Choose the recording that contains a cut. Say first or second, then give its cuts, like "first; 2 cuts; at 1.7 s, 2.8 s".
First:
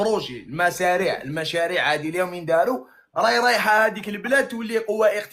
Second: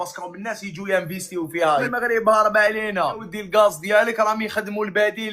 second; 1 cut; at 1.9 s